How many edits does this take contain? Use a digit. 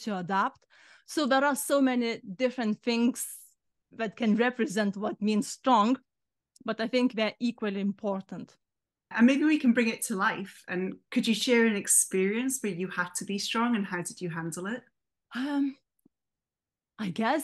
1